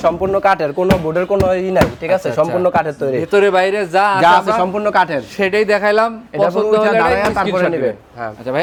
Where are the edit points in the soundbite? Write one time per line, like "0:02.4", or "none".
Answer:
none